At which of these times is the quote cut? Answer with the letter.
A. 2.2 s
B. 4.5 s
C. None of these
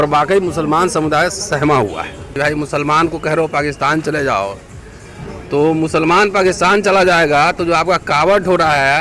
A